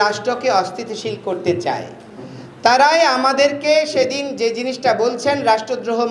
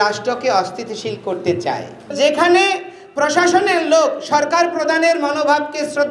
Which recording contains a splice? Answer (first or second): second